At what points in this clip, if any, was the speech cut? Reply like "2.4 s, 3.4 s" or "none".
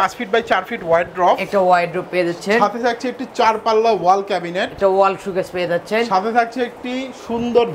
none

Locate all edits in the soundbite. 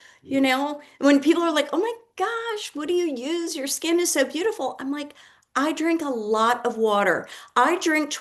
none

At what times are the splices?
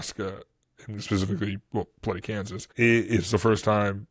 2.6 s

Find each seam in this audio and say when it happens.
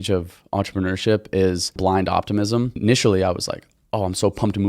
1.8 s, 2.8 s

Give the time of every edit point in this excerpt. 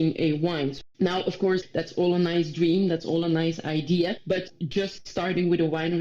0.8 s, 1.7 s, 4.6 s

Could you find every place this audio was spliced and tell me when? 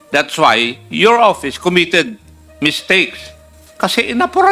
3.5 s

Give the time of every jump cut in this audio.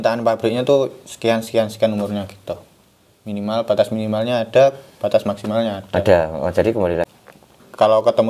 7.0 s

